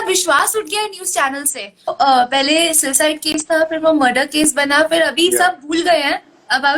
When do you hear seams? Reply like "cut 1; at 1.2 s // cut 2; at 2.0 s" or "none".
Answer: cut 1; at 1.9 s